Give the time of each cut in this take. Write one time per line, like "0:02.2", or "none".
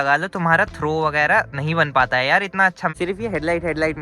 0:02.9